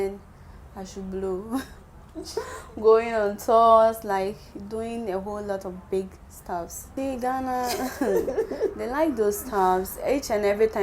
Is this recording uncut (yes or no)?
no